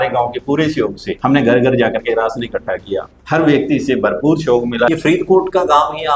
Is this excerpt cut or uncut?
cut